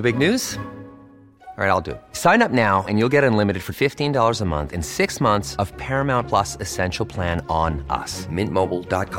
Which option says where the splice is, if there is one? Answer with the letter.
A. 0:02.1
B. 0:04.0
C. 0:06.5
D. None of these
D